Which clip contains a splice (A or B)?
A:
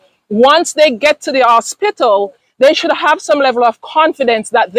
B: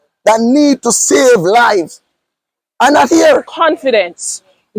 B